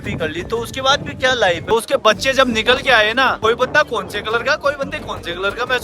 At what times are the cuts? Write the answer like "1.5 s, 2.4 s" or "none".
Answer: 1.7 s, 3.4 s